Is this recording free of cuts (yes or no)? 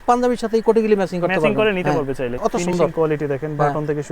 no